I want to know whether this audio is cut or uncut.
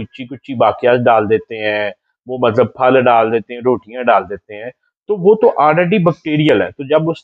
uncut